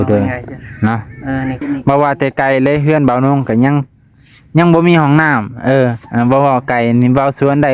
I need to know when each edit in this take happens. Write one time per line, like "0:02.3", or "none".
0:01.6